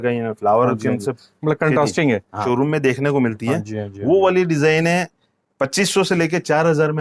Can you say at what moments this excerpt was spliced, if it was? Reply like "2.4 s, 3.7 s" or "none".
2.3 s